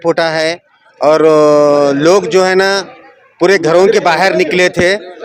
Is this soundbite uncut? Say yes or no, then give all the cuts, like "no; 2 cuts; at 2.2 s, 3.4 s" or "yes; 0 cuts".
yes; 0 cuts